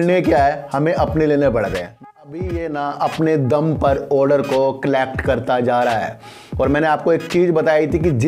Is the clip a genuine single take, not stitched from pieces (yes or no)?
no